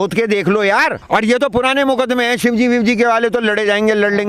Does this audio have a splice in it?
yes; 1 cut; at 1.0 s

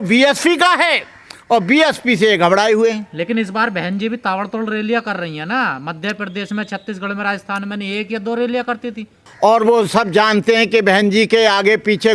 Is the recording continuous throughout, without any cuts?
yes; 0 cuts

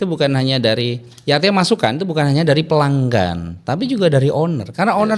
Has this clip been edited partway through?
no; 0 cuts

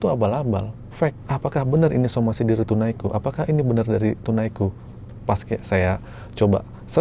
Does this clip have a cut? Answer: yes; 1 cut; at 1.3 s

